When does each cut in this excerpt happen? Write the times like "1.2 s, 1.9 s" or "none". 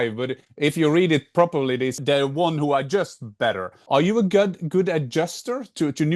1.9 s, 3.7 s